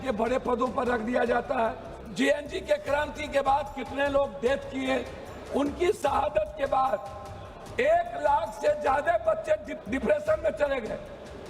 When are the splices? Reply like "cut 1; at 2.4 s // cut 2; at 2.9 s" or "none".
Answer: cut 1; at 2.0 s // cut 2; at 9.7 s